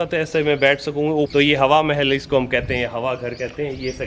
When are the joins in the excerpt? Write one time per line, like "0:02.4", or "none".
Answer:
0:01.3